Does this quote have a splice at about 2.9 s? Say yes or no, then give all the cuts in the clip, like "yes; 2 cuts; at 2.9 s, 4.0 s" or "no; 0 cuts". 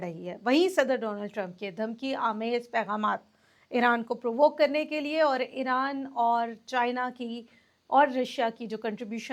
no; 0 cuts